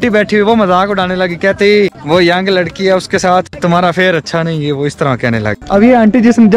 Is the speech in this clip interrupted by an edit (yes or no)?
yes